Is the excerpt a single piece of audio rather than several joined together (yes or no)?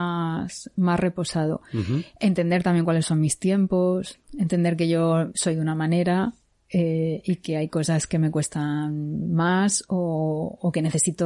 no